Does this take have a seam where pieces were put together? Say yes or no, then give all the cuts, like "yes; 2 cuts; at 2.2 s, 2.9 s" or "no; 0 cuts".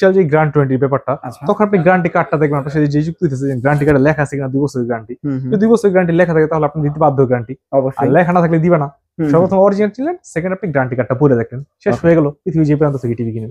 no; 0 cuts